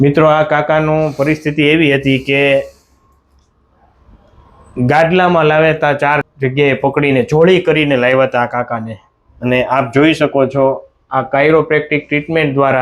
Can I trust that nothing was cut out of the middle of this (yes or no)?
no